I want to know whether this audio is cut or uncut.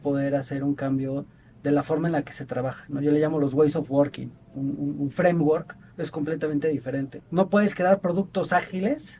cut